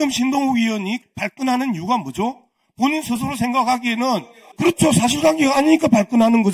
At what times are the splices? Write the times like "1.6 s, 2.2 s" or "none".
1.0 s, 4.4 s